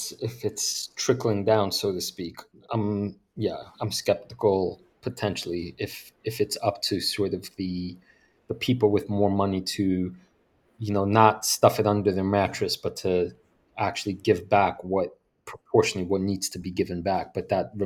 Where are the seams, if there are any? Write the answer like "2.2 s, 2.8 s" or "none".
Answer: none